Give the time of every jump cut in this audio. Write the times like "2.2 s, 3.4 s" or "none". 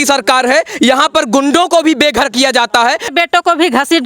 3.1 s